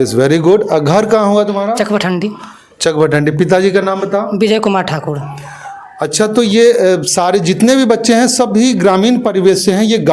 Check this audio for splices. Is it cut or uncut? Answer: uncut